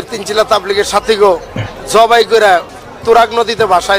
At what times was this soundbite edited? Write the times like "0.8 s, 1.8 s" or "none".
1.8 s, 2.7 s